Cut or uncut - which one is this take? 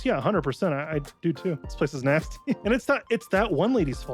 cut